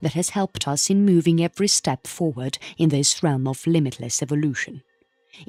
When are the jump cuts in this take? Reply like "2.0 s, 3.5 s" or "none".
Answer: none